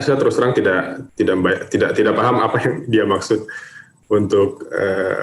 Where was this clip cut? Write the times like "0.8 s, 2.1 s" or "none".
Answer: 1.0 s